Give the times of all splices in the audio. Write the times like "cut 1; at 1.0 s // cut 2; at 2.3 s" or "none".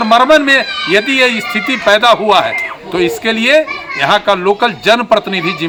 none